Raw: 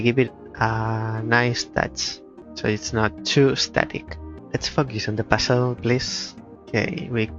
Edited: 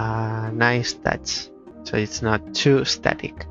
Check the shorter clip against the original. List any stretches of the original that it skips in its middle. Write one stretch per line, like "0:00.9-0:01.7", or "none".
none